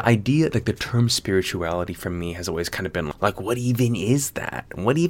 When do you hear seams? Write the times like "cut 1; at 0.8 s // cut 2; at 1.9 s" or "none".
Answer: cut 1; at 3.1 s